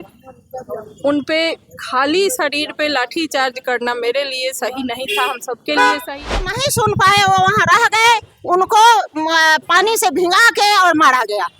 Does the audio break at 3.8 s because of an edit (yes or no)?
no